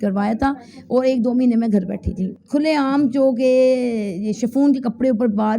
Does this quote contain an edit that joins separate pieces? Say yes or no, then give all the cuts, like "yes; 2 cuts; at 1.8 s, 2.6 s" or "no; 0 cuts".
yes; 1 cut; at 2.2 s